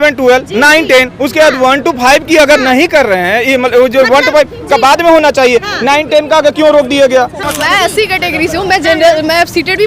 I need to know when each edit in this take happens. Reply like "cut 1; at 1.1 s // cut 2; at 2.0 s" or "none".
cut 1; at 7.5 s